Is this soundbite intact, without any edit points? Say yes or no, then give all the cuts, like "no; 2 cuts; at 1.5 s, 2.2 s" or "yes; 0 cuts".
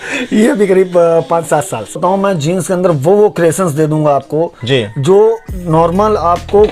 no; 1 cut; at 2.0 s